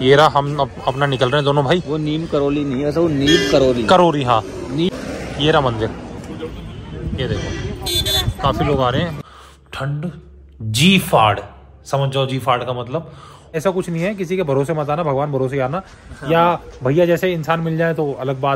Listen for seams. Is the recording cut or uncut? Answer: cut